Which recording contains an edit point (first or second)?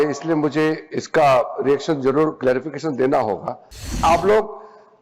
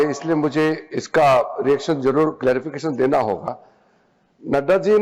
first